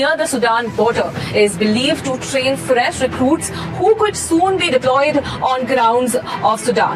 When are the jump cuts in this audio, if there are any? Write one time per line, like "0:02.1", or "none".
none